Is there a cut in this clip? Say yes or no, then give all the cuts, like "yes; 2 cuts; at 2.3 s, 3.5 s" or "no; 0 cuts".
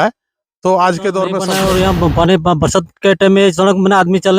yes; 1 cut; at 1.5 s